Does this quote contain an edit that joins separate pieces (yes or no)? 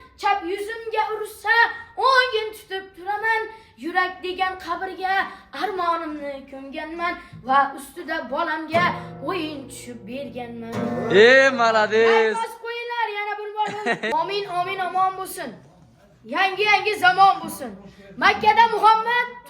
yes